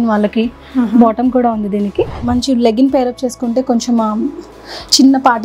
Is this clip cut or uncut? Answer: cut